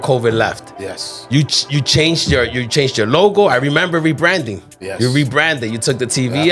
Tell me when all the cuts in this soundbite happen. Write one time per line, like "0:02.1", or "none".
none